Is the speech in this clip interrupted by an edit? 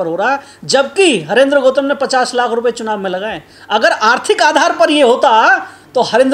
no; 0 cuts

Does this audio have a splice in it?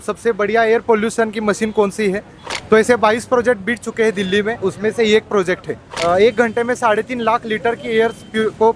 yes; 2 cuts; at 2.3 s, 5.9 s

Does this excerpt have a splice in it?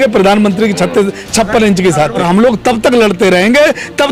yes; 1 cut; at 2.2 s

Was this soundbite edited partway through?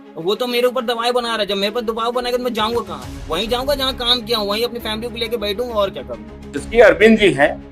yes; 1 cut; at 6.6 s

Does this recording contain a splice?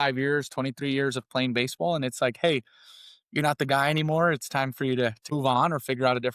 yes; 1 cut; at 5.2 s

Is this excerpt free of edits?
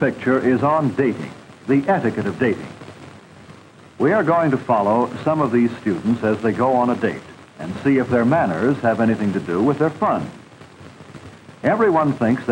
yes; 0 cuts

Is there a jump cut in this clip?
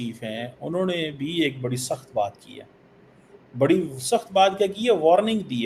no; 0 cuts

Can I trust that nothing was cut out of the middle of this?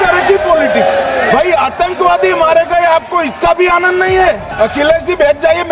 no; 2 cuts; at 1.3 s, 4.5 s

